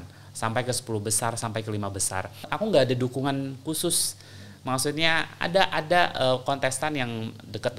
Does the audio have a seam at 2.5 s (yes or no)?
yes